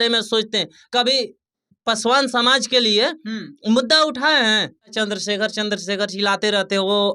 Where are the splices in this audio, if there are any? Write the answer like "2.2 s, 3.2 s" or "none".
4.9 s